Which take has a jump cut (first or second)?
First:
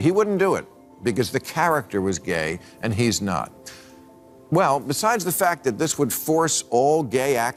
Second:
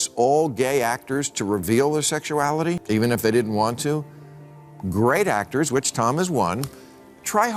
second